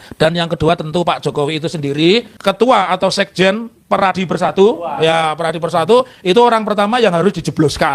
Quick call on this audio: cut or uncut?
cut